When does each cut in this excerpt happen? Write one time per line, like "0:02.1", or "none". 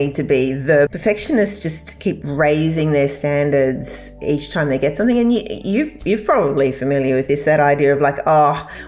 0:00.9

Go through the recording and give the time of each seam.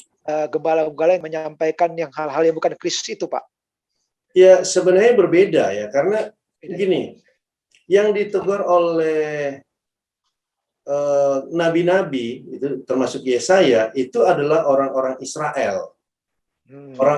0:01.2

